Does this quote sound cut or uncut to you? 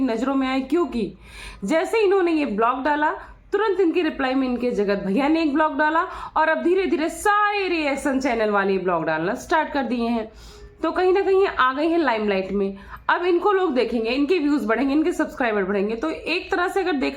uncut